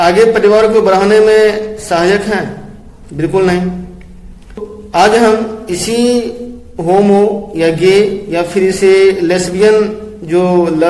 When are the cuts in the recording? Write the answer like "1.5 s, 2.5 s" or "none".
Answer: none